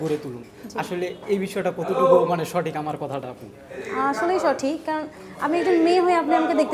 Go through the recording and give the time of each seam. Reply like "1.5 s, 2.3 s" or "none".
none